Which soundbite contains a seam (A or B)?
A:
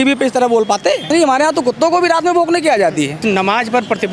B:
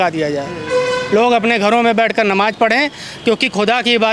A